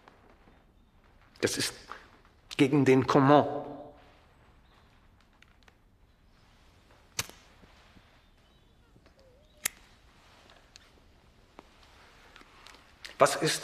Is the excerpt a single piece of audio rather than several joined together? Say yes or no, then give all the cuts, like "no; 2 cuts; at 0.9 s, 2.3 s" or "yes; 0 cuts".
yes; 0 cuts